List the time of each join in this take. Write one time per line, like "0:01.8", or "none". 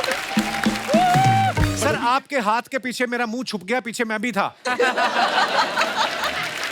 0:01.8